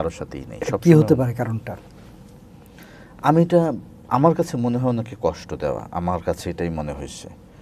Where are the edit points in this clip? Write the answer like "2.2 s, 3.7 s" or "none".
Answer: none